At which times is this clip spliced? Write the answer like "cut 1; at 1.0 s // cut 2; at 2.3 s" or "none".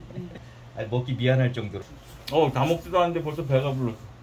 cut 1; at 1.8 s